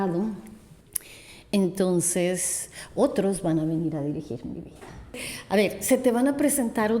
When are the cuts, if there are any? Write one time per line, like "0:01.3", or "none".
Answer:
0:05.3